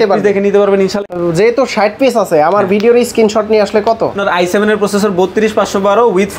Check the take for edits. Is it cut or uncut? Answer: cut